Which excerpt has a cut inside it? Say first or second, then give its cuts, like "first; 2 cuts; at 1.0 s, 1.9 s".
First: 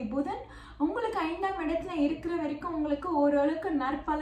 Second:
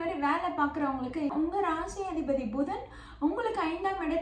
second; 1 cut; at 1.3 s